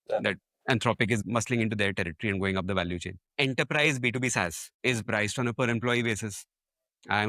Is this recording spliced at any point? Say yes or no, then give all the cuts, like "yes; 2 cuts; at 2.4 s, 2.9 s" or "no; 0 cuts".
yes; 3 cuts; at 1.2 s, 3.2 s, 4.6 s